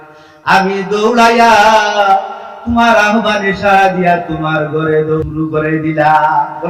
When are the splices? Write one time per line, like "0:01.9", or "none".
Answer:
0:05.2